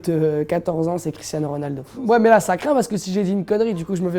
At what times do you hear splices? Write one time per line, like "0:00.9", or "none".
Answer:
0:02.0